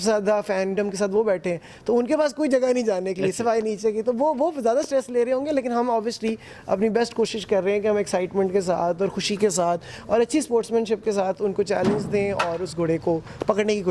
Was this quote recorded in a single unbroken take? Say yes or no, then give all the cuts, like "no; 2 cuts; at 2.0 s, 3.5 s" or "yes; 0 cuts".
yes; 0 cuts